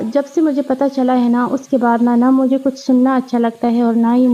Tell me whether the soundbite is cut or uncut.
uncut